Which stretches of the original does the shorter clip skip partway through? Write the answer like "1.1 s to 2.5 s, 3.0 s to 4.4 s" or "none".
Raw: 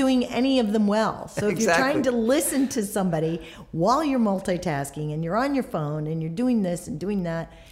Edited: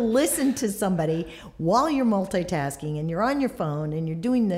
none